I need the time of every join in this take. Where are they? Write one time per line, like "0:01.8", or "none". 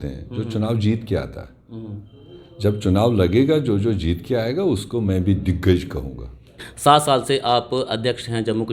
0:06.6